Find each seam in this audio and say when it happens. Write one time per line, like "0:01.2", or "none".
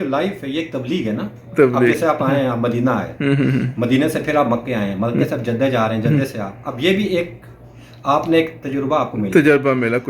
none

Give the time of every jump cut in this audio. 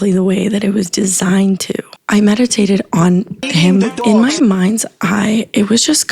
0:02.0
0:04.0

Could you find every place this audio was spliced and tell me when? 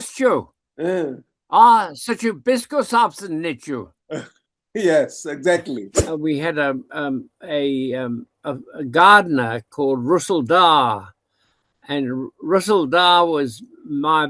0:05.9

